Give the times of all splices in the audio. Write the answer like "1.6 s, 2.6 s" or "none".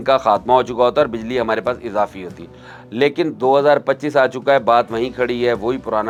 none